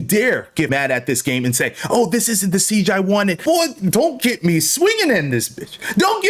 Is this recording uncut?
no; 2 cuts; at 0.7 s, 3.4 s

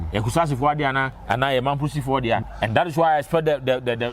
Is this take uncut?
no; 2 cuts; at 1.1 s, 2.5 s

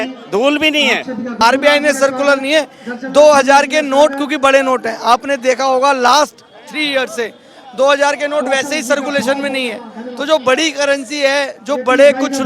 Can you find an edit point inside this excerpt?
yes; 1 cut; at 1.3 s

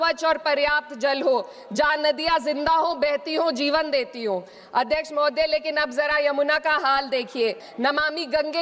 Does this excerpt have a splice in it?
yes; 1 cut; at 7.7 s

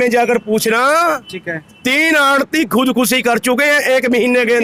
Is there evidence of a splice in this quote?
no; 0 cuts

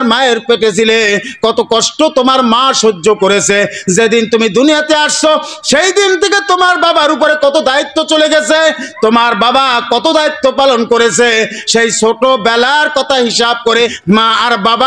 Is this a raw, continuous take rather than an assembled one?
no; 1 cut; at 14.0 s

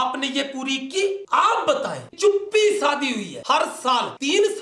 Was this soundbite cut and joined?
yes; 2 cuts; at 2.1 s, 3.4 s

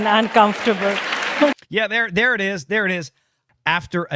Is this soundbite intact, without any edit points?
no; 1 cut; at 1.6 s

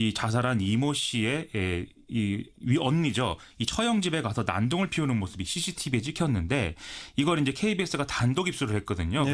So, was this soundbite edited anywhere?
yes; 1 cut; at 2.8 s

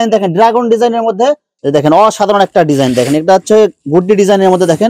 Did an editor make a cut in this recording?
yes; 1 cut; at 1.5 s

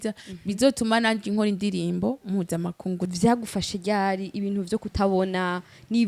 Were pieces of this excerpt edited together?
yes; 1 cut; at 3.1 s

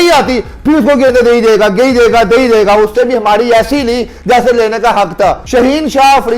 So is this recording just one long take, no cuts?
no; 1 cut; at 5.4 s

